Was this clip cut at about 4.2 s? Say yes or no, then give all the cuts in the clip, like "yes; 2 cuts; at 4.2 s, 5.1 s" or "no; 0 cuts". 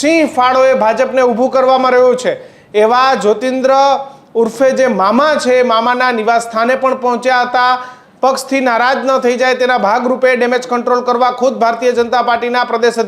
no; 1 cut; at 8.0 s